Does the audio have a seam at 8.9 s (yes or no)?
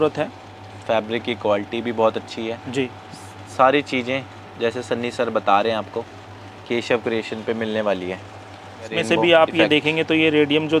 yes